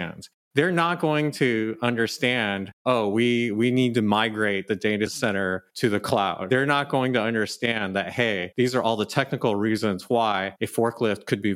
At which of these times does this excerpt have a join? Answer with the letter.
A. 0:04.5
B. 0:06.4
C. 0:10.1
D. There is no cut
B